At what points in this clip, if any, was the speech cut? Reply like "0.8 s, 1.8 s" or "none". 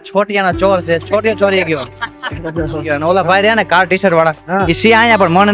2.8 s